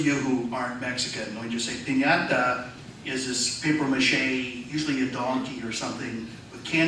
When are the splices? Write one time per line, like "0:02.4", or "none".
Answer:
0:02.3